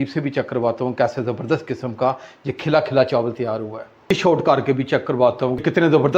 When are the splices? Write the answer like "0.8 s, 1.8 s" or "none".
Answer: 4.1 s